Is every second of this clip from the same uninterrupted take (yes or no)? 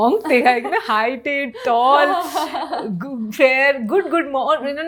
yes